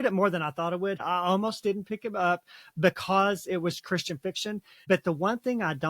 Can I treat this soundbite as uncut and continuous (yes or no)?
no